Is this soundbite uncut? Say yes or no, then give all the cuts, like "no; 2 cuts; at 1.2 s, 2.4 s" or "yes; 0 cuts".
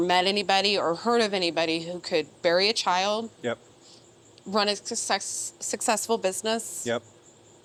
yes; 0 cuts